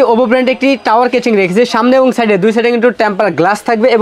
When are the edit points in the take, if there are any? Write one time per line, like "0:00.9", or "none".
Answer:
none

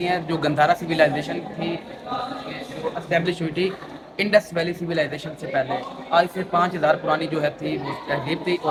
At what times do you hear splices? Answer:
none

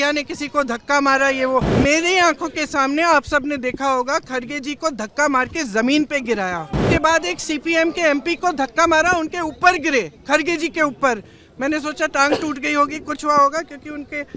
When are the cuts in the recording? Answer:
0:01.7
0:06.8

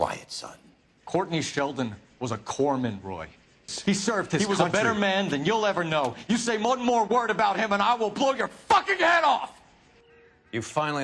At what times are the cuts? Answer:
0:04.4

